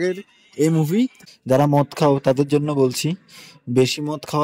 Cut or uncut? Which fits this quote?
cut